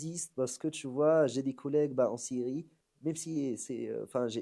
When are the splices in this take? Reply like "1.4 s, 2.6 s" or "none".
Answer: none